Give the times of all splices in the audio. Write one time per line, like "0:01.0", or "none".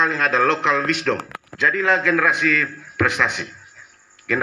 0:01.3